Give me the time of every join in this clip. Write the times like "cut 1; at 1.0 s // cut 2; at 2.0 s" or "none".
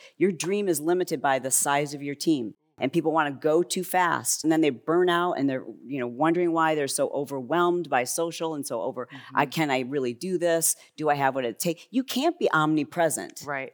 cut 1; at 4.4 s

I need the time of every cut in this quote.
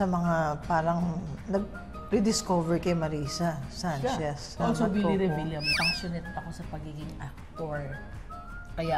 cut 1; at 4.6 s // cut 2; at 5.7 s

